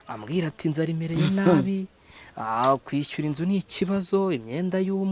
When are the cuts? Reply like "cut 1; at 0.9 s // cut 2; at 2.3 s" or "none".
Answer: none